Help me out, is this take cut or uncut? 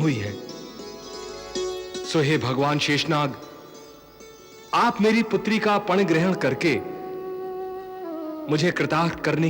cut